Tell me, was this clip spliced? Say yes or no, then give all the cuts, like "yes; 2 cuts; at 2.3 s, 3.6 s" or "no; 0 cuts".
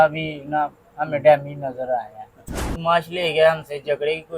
yes; 1 cut; at 2.7 s